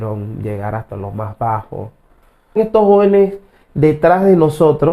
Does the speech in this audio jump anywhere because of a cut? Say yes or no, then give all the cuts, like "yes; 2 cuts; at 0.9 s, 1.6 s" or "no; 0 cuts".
yes; 1 cut; at 2.6 s